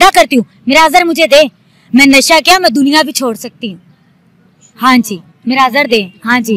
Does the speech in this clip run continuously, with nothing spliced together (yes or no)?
yes